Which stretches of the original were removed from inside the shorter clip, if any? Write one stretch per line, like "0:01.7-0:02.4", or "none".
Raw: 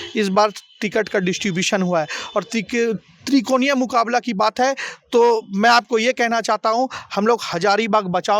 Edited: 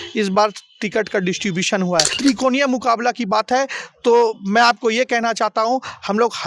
0:02.1-0:03.2